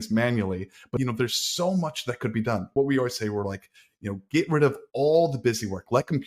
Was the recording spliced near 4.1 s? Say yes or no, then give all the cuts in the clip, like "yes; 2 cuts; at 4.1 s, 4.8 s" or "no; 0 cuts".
no; 2 cuts; at 0.9 s, 2.7 s